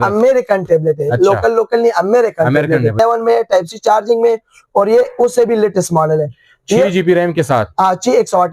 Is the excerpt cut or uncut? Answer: cut